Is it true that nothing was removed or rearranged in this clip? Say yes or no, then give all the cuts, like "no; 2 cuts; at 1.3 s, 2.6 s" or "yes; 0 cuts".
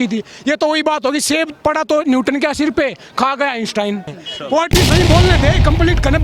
no; 1 cut; at 4.2 s